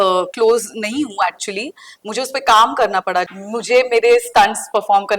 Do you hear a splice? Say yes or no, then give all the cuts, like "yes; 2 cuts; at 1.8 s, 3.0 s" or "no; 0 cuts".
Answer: yes; 1 cut; at 3.3 s